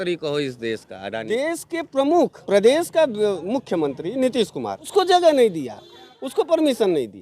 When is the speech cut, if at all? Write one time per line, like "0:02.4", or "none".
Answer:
0:01.3
0:02.4
0:04.8